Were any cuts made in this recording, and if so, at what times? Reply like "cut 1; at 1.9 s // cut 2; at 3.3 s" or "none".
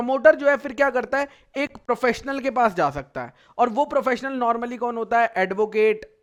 none